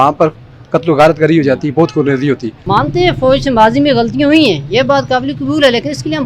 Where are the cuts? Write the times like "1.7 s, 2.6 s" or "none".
2.6 s